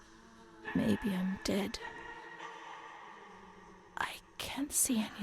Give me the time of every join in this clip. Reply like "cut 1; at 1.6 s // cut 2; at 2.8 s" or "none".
cut 1; at 1.8 s // cut 2; at 3.9 s